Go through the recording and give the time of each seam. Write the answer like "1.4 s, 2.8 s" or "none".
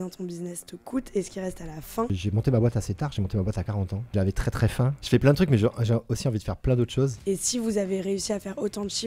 2.1 s, 4.5 s, 7.2 s